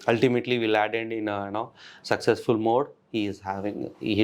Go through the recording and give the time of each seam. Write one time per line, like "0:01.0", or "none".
none